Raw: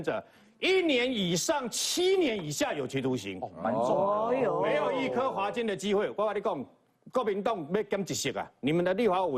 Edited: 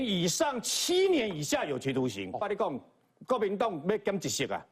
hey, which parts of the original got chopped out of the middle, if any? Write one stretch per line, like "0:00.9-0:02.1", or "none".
0:03.5-0:06.3

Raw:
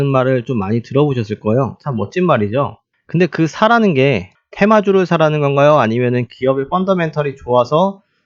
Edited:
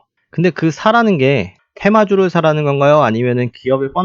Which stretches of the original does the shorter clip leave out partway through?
none

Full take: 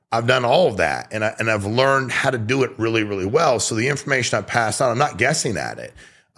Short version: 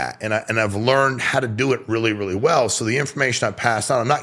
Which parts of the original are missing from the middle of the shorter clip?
none

